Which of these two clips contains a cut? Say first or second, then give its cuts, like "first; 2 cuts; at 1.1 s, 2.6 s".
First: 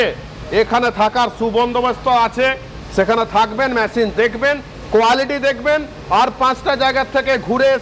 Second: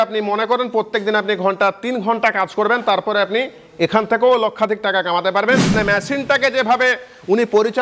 second; 1 cut; at 5.8 s